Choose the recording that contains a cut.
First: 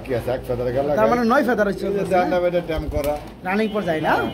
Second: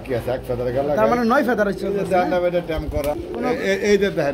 second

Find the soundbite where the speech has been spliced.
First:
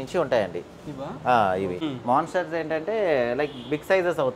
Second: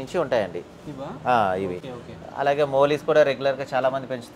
first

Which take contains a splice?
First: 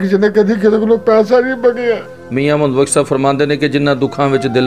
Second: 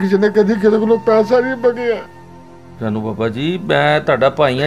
first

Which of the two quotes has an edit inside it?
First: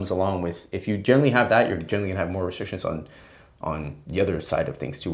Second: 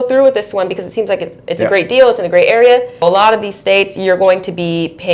second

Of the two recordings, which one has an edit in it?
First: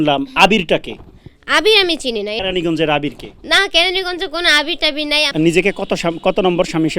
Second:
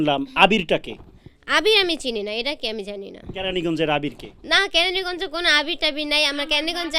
first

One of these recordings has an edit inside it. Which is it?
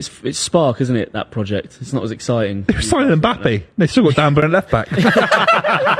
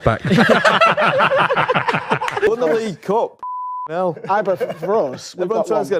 second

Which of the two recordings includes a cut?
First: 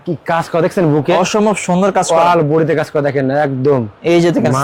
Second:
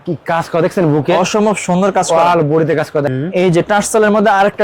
second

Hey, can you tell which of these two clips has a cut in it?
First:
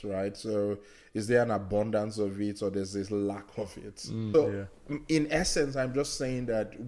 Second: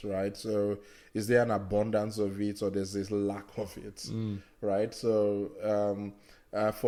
first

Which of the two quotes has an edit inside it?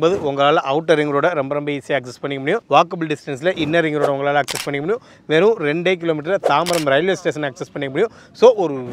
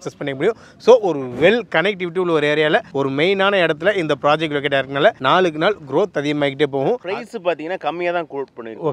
second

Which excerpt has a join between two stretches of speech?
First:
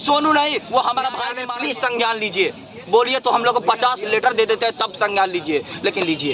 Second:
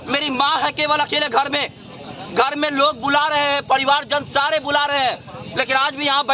first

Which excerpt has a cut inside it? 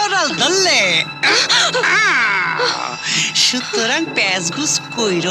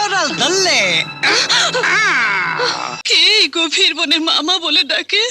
second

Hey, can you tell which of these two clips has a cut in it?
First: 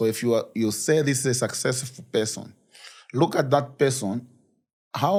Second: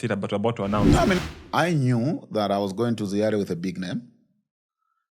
second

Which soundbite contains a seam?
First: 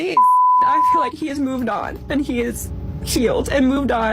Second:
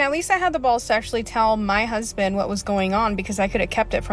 first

